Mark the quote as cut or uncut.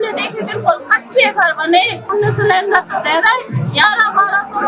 cut